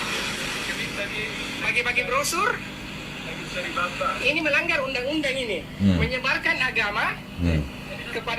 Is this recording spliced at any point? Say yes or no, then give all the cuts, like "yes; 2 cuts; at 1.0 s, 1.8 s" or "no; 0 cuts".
no; 0 cuts